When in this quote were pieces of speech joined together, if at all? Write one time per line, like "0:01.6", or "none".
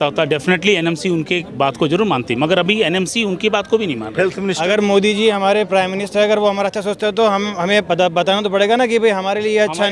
0:04.5